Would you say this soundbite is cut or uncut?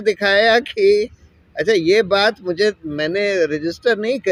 uncut